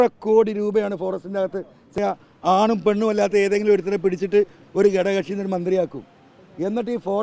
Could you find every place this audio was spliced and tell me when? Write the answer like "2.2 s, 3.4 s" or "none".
2.0 s